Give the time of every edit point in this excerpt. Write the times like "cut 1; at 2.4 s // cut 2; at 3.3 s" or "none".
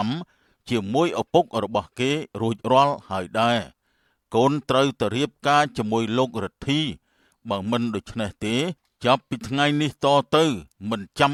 none